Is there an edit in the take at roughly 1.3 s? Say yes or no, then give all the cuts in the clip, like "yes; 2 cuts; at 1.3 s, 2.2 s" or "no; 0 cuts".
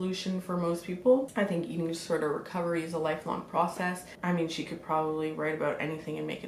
yes; 2 cuts; at 1.3 s, 4.1 s